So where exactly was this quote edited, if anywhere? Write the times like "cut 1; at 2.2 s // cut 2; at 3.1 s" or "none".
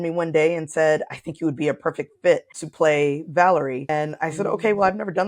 cut 1; at 2.6 s // cut 2; at 3.8 s